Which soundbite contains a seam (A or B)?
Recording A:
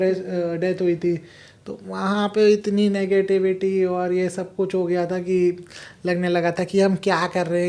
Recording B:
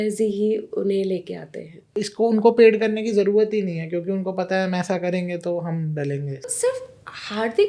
B